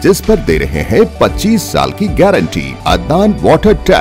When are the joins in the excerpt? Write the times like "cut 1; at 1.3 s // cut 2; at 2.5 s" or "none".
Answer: cut 1; at 2.7 s